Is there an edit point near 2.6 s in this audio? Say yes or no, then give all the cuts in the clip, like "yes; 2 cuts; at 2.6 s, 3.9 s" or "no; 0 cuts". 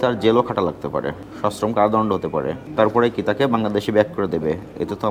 yes; 2 cuts; at 1.2 s, 2.6 s